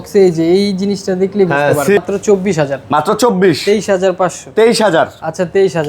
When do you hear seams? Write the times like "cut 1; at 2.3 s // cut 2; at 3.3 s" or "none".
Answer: cut 1; at 2.0 s